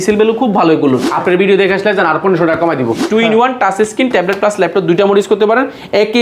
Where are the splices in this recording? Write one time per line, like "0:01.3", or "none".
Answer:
0:01.1
0:03.0